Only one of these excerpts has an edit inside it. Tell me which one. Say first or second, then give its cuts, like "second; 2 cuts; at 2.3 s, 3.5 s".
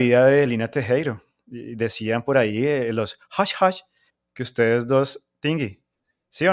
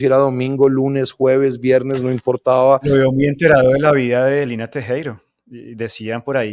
second; 1 cut; at 2.8 s